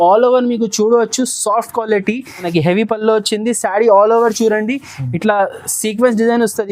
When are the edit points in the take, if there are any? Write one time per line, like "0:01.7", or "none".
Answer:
0:02.5